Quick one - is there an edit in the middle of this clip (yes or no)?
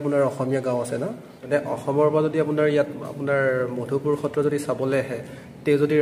yes